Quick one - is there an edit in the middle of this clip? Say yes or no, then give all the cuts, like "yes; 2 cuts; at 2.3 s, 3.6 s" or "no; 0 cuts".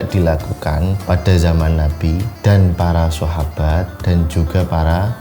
yes; 3 cuts; at 1.0 s, 2.3 s, 3.9 s